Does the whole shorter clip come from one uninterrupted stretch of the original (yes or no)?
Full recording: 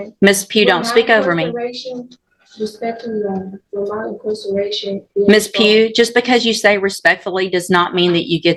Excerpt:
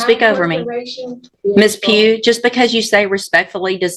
no